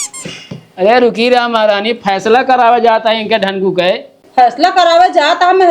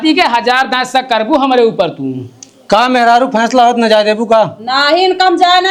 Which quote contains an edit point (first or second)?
first